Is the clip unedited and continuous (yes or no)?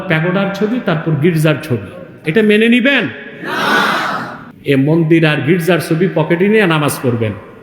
no